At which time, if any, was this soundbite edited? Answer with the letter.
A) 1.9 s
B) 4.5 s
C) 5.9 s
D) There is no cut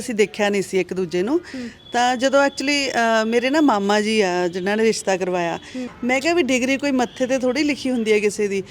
C